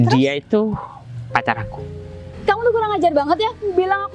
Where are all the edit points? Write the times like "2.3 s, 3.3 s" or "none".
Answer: 2.3 s